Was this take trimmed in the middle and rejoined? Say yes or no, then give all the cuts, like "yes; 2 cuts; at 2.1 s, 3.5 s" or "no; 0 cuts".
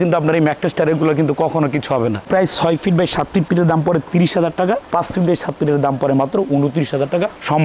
no; 0 cuts